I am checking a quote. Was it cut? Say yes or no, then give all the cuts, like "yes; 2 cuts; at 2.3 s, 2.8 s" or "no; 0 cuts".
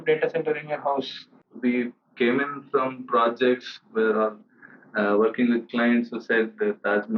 yes; 1 cut; at 1.4 s